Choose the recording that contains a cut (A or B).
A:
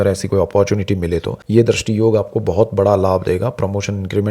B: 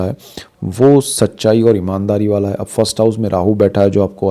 A